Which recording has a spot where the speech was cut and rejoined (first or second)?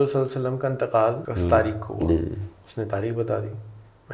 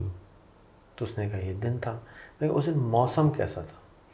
first